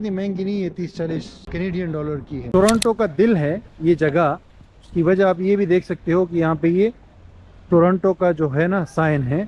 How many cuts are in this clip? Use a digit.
2